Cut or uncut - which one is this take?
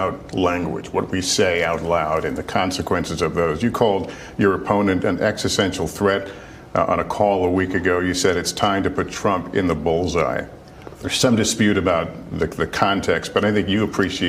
cut